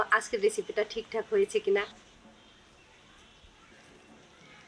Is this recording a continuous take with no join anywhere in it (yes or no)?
no